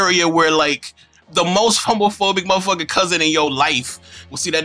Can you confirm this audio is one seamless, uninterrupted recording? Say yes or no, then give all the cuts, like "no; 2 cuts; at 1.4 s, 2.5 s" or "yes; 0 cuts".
yes; 0 cuts